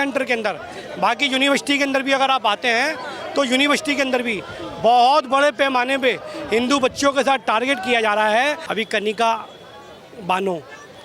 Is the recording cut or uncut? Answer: cut